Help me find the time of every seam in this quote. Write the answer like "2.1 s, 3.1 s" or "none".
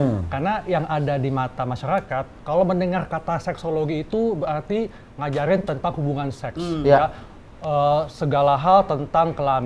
none